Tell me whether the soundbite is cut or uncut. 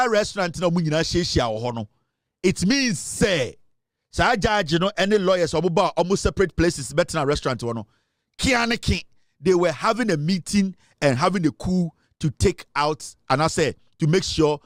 uncut